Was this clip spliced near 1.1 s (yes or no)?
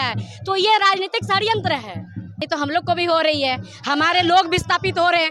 no